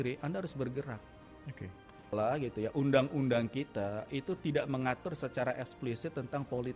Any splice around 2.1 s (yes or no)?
yes